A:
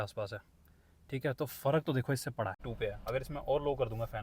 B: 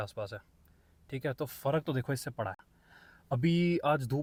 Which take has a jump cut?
A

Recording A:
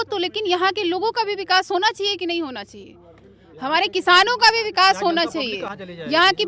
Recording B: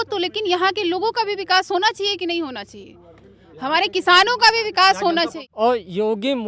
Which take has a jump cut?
B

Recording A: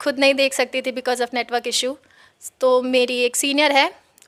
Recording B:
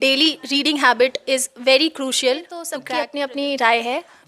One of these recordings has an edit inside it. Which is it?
B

